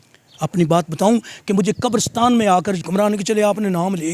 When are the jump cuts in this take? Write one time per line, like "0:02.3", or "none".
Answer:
0:02.8